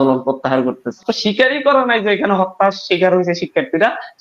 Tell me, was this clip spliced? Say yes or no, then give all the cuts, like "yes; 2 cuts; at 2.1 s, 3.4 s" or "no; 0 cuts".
yes; 1 cut; at 1.0 s